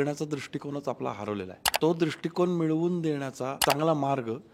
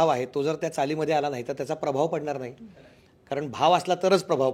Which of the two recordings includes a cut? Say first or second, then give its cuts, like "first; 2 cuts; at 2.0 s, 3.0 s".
first; 2 cuts; at 1.7 s, 3.6 s